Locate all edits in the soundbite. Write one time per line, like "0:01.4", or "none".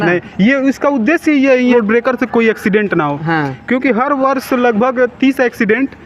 0:01.7